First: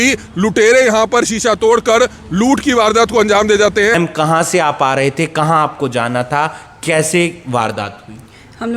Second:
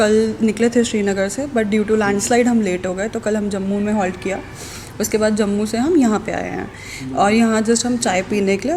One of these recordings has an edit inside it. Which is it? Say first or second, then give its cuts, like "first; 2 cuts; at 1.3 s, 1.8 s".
first; 1 cut; at 3.9 s